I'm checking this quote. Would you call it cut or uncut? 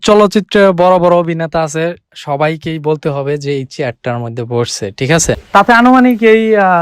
cut